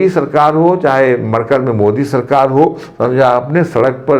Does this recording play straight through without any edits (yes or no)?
yes